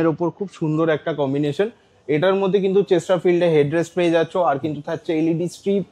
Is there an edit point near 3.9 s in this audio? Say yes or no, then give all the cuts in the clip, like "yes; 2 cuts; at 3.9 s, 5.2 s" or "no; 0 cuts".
no; 0 cuts